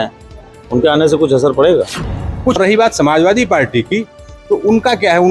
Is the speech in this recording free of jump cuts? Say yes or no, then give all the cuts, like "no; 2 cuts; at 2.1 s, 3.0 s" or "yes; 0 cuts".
no; 1 cut; at 2.6 s